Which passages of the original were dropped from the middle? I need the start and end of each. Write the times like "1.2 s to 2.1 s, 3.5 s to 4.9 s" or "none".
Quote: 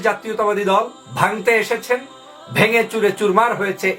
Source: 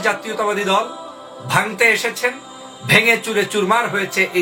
1.0 s to 1.3 s